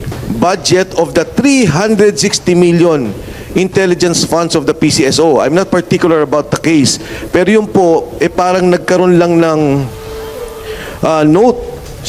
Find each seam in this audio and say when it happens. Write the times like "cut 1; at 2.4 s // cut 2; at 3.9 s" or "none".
none